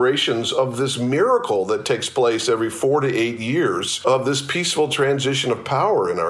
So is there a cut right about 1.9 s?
no; 1 cut; at 3.9 s

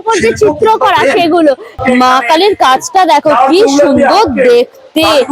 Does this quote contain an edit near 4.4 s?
no; 1 cut; at 2.0 s

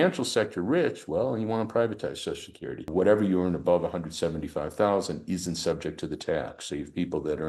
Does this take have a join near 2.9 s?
yes; 1 cut; at 2.9 s

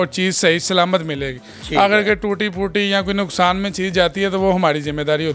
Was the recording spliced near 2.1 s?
no; 0 cuts

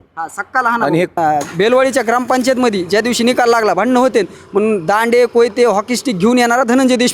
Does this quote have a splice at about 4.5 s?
no; 1 cut; at 1.2 s

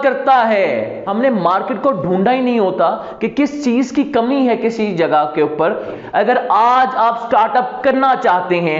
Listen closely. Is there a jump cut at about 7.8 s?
no; 2 cuts; at 1.0 s, 5.9 s

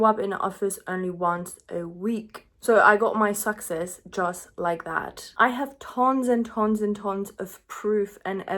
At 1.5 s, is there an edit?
no; 1 cut; at 5.2 s

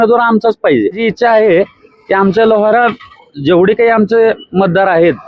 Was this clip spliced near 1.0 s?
yes; 1 cut; at 1.0 s

